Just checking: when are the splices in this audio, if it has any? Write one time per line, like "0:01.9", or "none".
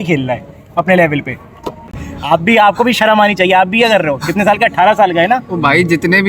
0:01.8